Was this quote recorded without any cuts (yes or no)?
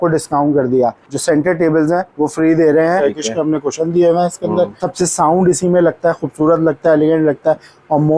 no